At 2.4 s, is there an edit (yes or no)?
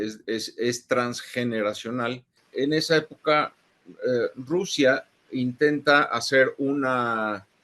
yes